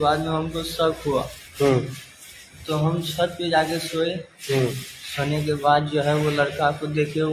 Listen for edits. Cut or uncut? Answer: uncut